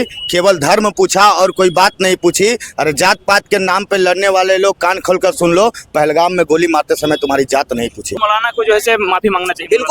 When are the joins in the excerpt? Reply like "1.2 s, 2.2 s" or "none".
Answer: 8.1 s